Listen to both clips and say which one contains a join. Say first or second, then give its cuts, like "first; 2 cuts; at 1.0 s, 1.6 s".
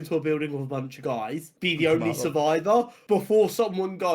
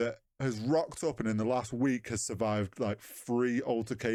first; 2 cuts; at 1.5 s, 3.0 s